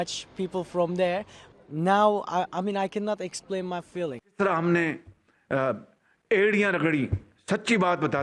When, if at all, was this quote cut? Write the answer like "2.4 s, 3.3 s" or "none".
1.4 s, 4.2 s